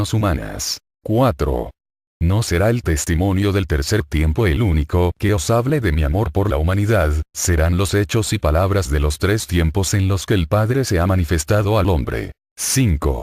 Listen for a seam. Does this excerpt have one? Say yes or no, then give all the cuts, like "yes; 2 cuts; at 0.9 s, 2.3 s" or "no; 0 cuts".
yes; 1 cut; at 4.8 s